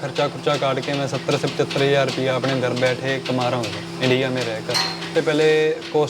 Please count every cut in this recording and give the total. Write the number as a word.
one